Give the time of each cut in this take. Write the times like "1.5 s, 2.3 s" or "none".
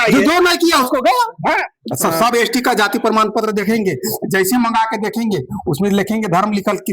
1.7 s